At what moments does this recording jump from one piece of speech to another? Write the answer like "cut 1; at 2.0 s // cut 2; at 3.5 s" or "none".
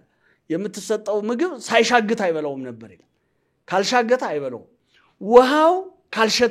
none